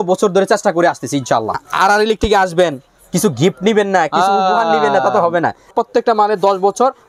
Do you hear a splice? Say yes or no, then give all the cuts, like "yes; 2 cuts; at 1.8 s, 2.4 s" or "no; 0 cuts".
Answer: yes; 2 cuts; at 1.6 s, 5.7 s